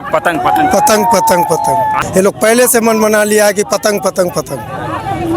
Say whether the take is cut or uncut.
cut